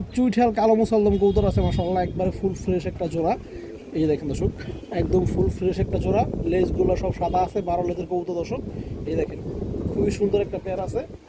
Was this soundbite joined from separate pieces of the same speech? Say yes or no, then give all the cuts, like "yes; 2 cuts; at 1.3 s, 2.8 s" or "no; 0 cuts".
no; 0 cuts